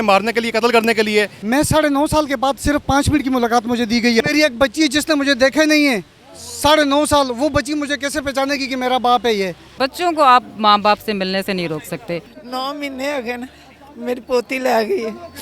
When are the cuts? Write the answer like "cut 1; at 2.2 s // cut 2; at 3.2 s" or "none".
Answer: cut 1; at 1.4 s // cut 2; at 4.2 s // cut 3; at 9.6 s // cut 4; at 12.4 s